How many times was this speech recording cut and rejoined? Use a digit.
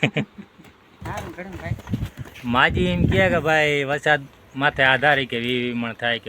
1